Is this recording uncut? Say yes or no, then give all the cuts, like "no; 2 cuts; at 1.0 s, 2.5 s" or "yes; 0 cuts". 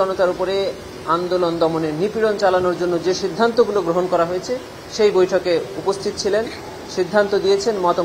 yes; 0 cuts